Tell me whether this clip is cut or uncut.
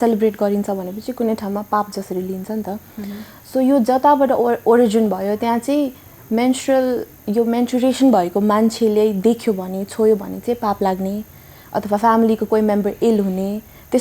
uncut